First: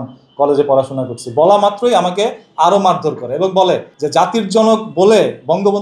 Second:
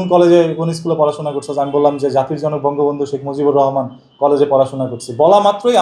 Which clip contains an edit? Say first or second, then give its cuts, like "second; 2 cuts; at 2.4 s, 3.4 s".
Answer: first; 1 cut; at 3.9 s